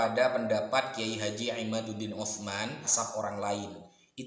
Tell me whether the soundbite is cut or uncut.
cut